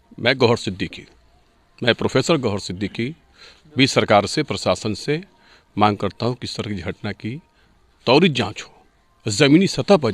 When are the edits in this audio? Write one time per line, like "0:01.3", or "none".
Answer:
none